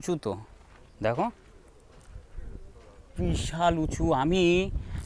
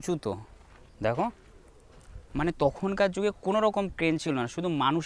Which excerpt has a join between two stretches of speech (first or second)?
second